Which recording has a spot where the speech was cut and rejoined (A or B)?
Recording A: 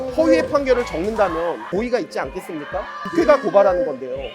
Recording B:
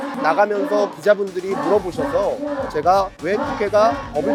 A